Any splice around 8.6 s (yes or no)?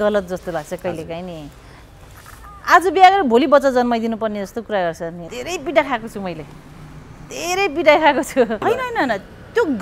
yes